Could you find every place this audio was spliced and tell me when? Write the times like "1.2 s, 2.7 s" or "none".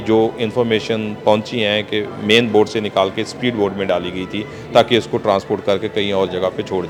none